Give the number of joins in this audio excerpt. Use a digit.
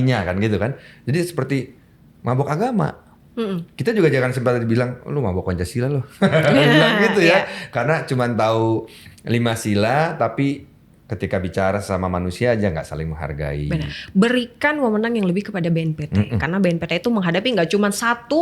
1